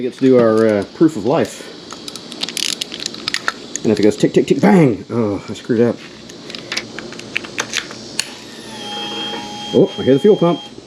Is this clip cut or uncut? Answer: cut